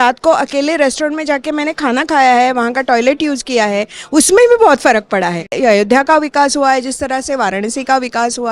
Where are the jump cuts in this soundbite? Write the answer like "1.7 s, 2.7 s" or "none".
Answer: 5.5 s

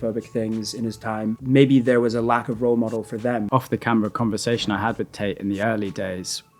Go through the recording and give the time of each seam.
1.3 s, 3.5 s

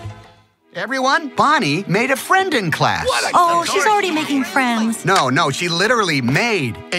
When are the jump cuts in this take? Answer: 1.0 s

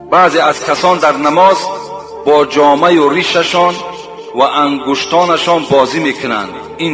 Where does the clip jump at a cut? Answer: none

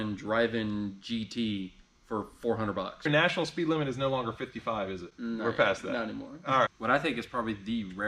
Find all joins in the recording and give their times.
3.1 s, 6.7 s

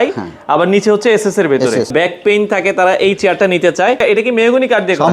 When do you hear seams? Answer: 1.9 s, 4.0 s

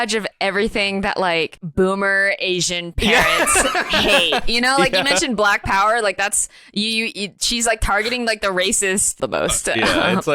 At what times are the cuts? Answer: 1.6 s, 9.2 s

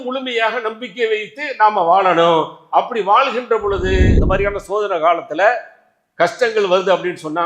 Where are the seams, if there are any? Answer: 4.1 s

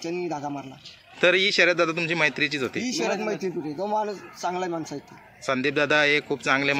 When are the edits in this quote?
none

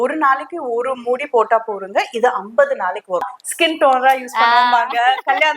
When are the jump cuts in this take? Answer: 3.3 s

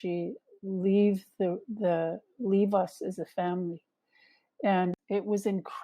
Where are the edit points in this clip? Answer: 4.9 s

